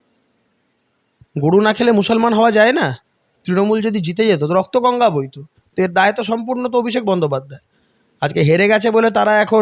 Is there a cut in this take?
yes; 1 cut; at 3.4 s

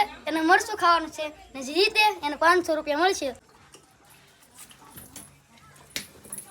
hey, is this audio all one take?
no; 1 cut; at 3.4 s

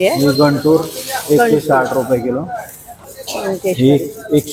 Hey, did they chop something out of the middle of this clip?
yes; 1 cut; at 2.9 s

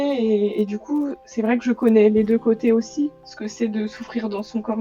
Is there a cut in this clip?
no; 0 cuts

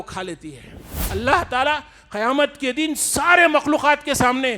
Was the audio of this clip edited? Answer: yes; 1 cut; at 1.0 s

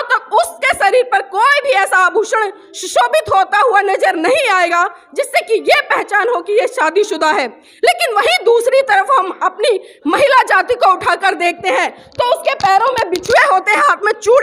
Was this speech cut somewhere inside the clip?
no; 0 cuts

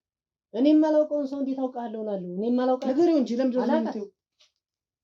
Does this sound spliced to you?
no; 0 cuts

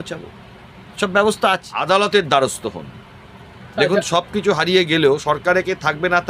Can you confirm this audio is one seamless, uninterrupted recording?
no; 1 cut; at 1.7 s

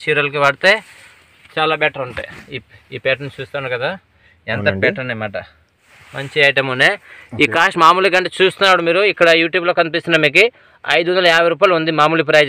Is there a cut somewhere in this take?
no; 0 cuts

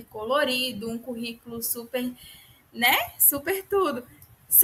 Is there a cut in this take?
no; 0 cuts

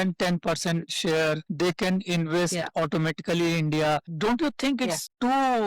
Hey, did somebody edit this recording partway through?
no; 0 cuts

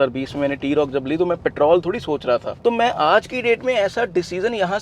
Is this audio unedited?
yes; 0 cuts

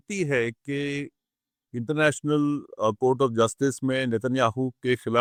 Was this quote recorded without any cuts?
yes; 0 cuts

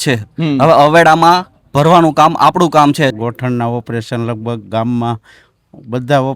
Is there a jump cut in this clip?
yes; 1 cut; at 3.1 s

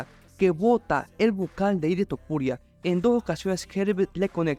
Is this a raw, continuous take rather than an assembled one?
yes; 0 cuts

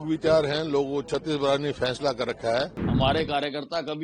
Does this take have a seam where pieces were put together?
yes; 1 cut; at 2.8 s

